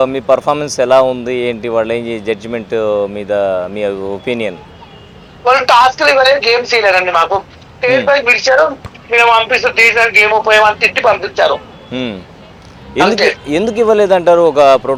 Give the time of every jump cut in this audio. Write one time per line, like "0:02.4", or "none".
none